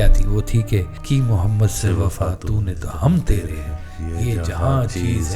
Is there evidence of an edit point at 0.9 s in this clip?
yes; 1 cut; at 0.9 s

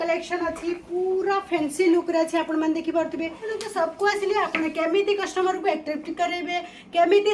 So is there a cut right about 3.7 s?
yes; 1 cut; at 3.7 s

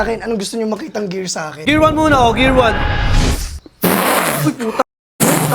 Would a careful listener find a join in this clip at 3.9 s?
no; 1 cut; at 1.6 s

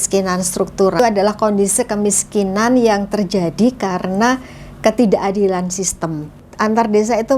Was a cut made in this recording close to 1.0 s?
yes; 2 cuts; at 1.0 s, 6.5 s

